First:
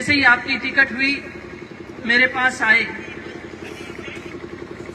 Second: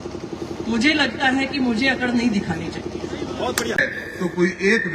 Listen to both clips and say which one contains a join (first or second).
second